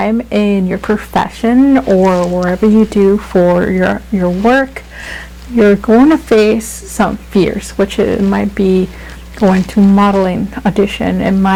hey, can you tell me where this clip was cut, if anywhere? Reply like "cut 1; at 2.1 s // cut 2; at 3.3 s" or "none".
none